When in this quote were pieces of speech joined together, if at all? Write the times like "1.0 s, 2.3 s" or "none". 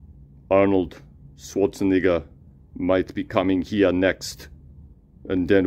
none